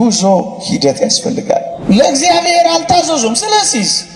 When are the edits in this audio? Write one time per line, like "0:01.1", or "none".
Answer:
0:01.7